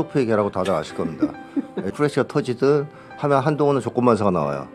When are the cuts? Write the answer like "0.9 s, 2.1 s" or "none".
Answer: 1.8 s